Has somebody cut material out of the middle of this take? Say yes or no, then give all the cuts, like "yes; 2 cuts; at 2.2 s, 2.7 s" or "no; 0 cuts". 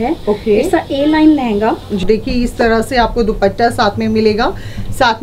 yes; 1 cut; at 2.0 s